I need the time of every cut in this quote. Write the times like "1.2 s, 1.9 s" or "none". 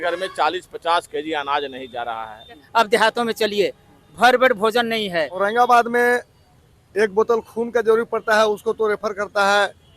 2.6 s, 5.3 s

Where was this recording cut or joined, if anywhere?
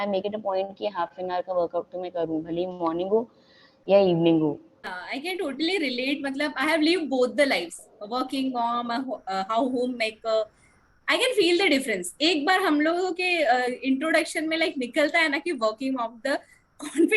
4.7 s

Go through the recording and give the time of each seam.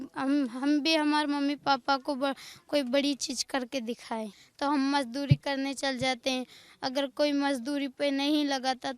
4.4 s

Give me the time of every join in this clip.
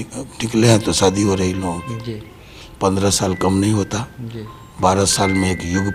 none

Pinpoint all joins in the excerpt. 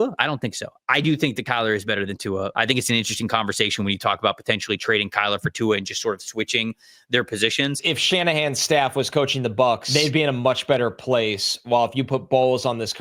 2.5 s, 7.9 s, 9.8 s

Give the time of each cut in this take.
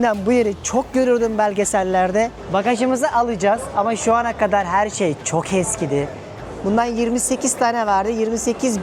2.4 s, 6.4 s

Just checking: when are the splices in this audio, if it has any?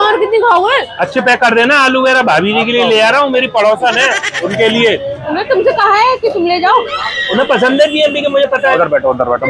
1.0 s, 4.3 s, 5.2 s, 7.1 s, 8.7 s

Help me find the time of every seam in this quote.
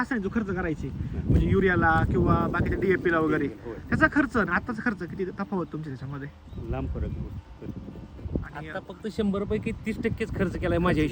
6.4 s

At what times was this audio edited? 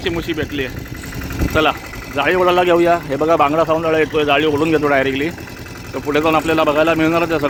none

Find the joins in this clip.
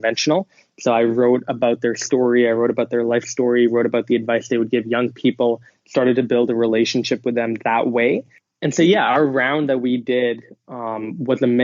8.4 s

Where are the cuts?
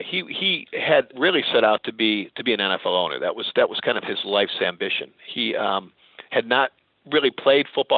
1.1 s

